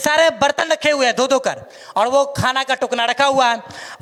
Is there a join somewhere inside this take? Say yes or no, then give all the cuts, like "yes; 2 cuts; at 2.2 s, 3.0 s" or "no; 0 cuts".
no; 0 cuts